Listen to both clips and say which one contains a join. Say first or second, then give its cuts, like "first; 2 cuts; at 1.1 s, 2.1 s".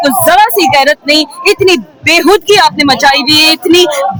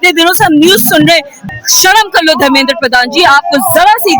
second; 1 cut; at 1.4 s